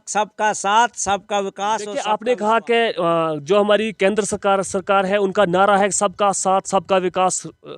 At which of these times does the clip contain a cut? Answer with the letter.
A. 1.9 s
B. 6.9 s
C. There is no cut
A